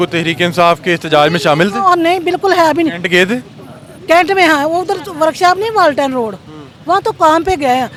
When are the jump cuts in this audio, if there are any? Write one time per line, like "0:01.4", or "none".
none